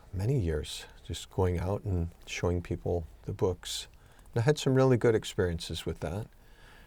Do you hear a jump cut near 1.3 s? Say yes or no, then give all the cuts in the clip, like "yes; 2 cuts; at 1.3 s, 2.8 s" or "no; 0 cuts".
no; 0 cuts